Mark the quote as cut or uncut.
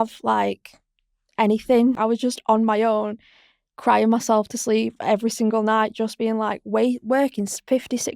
cut